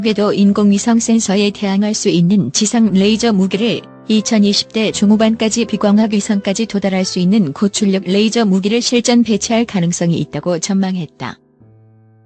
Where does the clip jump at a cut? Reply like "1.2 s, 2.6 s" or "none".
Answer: 11.4 s